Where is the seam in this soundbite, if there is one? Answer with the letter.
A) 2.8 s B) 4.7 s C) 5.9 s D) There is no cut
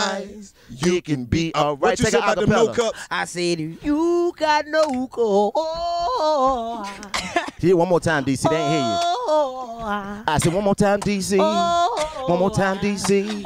D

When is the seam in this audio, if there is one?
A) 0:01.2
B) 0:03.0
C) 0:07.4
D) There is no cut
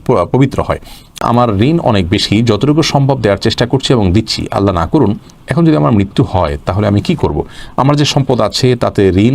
A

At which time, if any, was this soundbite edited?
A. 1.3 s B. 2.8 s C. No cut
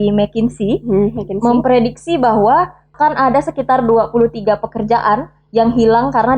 B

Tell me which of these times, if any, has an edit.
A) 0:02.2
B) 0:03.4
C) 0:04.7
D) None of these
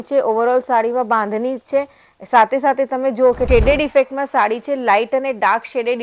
B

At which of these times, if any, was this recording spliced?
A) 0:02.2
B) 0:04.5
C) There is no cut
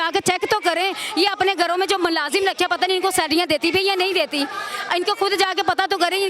C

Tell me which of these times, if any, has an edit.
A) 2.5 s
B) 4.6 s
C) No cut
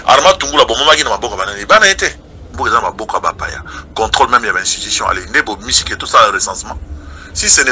A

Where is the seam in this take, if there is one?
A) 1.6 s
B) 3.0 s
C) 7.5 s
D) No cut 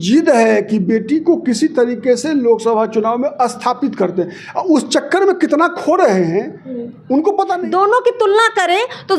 C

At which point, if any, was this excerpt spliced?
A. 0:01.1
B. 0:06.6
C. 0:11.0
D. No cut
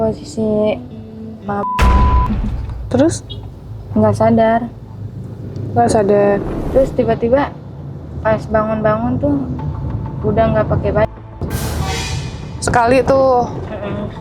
B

